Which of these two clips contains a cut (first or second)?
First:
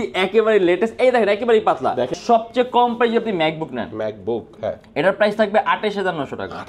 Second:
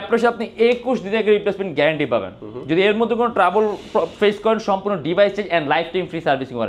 first